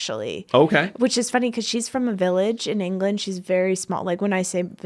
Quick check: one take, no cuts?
yes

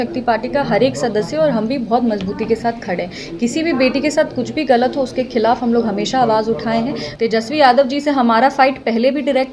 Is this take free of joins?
no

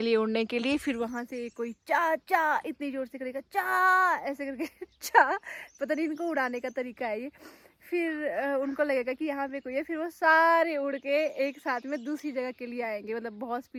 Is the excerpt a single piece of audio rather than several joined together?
yes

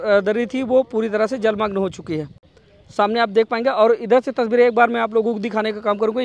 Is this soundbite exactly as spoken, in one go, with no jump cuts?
yes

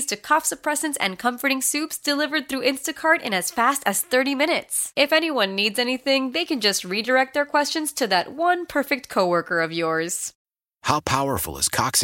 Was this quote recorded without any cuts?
no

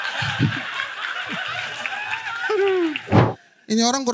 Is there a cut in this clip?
yes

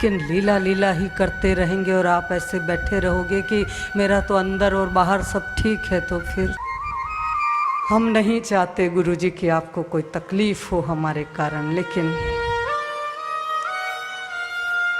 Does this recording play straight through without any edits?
no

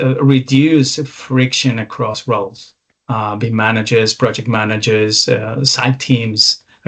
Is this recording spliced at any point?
no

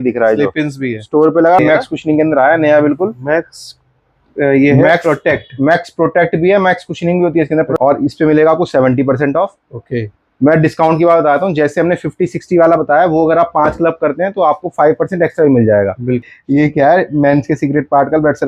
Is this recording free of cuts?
no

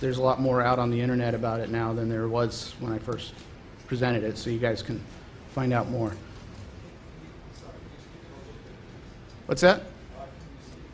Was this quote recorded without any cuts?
yes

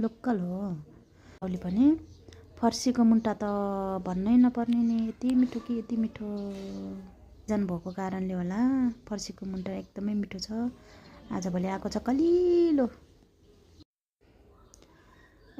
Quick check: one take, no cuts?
no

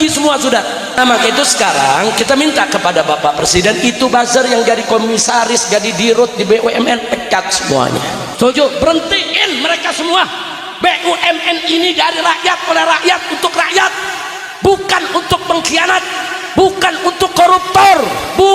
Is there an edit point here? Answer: yes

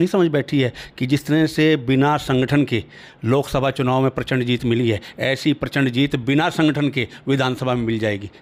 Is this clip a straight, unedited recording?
yes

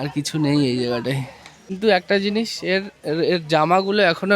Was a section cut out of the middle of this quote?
yes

